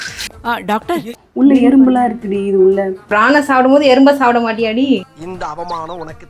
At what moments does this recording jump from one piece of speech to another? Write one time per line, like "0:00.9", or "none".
0:01.2
0:03.1
0:05.0